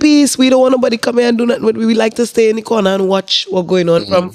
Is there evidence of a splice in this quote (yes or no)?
no